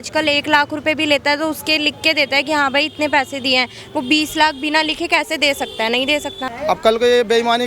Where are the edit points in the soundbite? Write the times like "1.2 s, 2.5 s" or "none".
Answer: 6.4 s